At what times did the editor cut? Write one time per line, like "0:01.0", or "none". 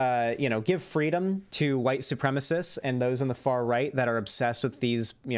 none